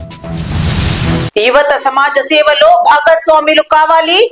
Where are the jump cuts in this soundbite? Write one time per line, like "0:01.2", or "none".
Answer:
0:01.3